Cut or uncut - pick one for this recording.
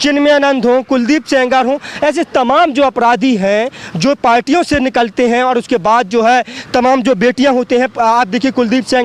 uncut